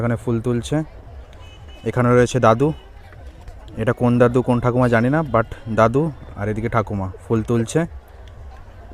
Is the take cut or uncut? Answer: uncut